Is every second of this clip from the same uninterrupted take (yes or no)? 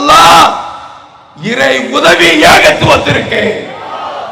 yes